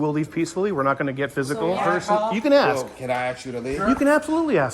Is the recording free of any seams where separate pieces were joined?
no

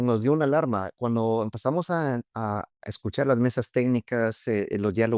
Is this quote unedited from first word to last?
yes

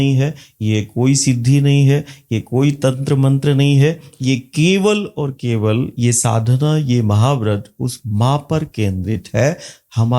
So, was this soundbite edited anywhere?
no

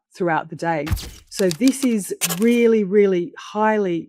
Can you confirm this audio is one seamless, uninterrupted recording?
yes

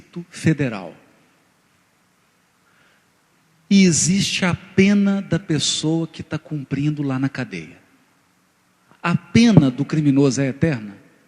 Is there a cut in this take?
yes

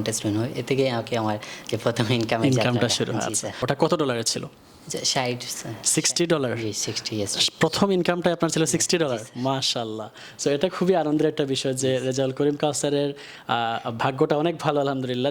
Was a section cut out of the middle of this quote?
yes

